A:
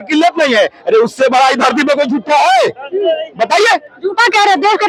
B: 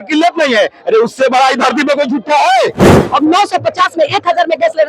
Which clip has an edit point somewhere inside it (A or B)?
B